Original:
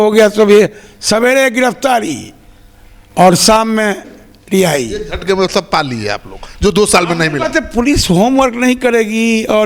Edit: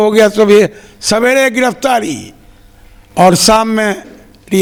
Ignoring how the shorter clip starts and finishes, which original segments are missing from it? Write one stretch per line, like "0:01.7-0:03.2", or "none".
none